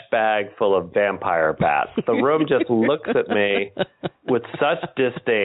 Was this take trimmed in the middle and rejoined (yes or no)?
yes